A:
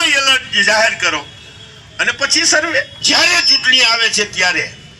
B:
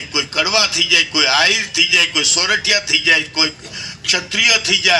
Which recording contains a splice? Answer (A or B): A